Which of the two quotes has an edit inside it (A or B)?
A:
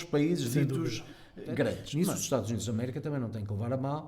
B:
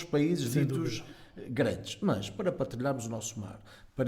A